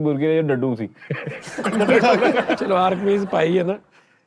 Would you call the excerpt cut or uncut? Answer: cut